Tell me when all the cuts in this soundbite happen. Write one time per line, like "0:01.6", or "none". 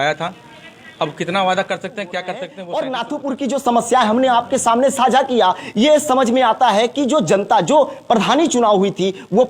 0:02.5